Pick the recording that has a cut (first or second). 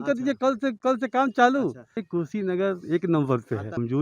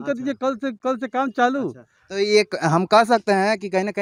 first